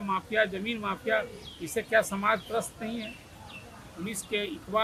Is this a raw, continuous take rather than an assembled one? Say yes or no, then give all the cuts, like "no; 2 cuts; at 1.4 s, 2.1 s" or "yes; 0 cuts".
yes; 0 cuts